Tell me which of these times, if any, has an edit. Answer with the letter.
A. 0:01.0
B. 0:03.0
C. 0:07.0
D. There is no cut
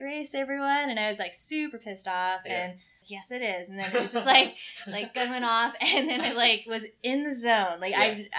B